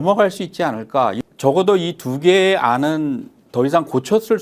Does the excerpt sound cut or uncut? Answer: cut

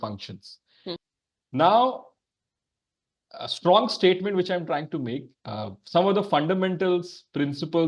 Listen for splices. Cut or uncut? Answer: cut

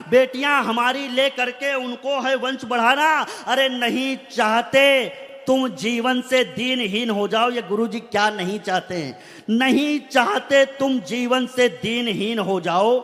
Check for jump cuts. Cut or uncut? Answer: uncut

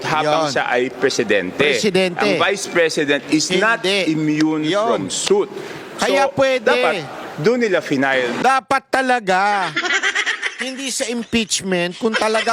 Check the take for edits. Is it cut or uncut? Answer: uncut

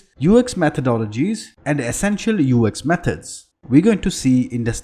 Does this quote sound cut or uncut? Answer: cut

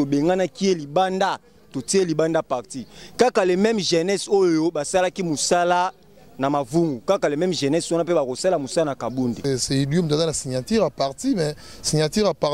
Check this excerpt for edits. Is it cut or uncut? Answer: cut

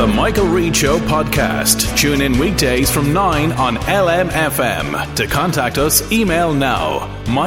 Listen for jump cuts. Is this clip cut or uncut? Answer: uncut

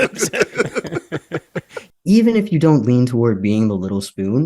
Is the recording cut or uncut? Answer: cut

